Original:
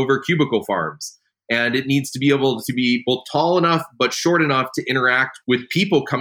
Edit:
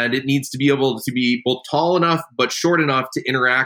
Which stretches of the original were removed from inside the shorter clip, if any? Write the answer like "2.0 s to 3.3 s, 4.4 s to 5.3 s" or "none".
none